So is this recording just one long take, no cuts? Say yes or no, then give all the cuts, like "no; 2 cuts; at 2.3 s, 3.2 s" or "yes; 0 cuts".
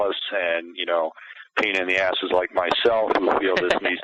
yes; 0 cuts